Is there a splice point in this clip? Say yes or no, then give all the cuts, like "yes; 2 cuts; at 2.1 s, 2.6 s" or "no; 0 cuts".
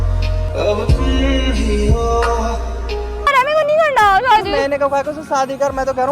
yes; 1 cut; at 3.2 s